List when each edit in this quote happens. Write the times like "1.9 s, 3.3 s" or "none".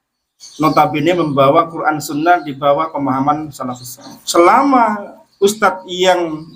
4.2 s